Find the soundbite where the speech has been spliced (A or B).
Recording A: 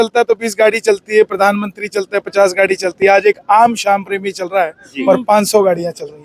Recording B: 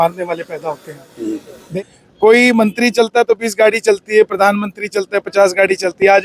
B